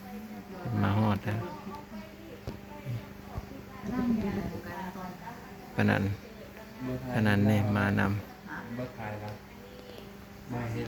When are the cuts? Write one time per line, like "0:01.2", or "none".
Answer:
none